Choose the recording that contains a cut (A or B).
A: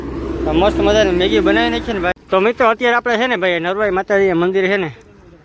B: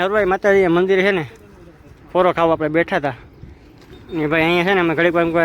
A